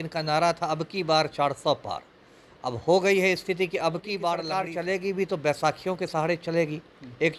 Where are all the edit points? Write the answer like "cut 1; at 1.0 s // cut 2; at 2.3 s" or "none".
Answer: cut 1; at 4.5 s